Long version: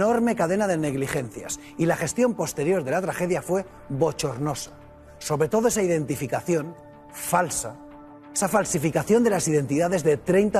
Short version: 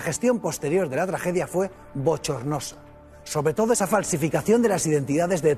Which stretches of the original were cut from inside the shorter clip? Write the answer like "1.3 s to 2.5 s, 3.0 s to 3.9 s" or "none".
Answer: 5.7 s to 8.4 s